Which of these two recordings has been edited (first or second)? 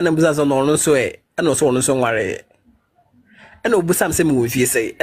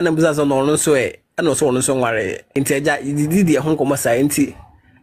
second